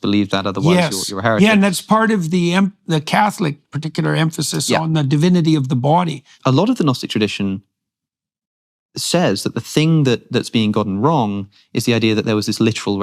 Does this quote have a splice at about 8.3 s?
no; 1 cut; at 6.3 s

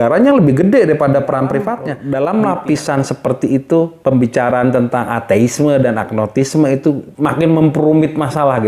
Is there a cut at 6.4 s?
no; 1 cut; at 1.9 s

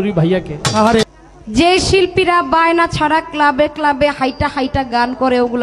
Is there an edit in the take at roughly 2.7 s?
no; 1 cut; at 1.0 s

